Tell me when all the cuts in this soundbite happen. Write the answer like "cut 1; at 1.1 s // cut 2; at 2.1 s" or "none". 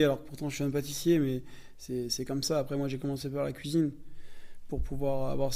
none